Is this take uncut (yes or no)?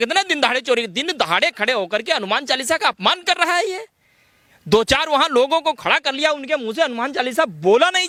yes